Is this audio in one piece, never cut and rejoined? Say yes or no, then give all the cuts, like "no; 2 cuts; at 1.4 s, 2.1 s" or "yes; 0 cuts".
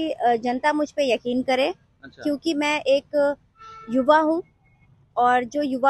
yes; 0 cuts